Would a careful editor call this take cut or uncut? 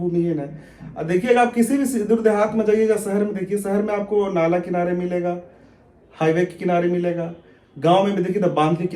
uncut